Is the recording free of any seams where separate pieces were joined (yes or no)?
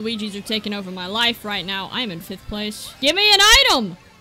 no